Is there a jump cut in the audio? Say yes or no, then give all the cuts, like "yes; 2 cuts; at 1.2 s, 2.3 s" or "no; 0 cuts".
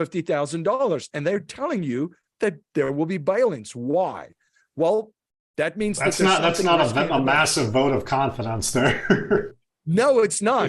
no; 0 cuts